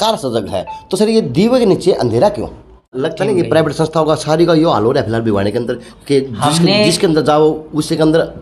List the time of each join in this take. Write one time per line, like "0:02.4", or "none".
0:02.9